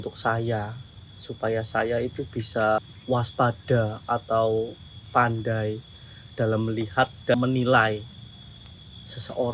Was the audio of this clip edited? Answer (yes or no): yes